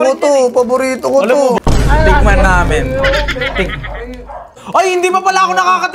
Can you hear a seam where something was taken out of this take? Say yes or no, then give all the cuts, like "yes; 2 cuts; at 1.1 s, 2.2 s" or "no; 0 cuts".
yes; 2 cuts; at 1.6 s, 4.6 s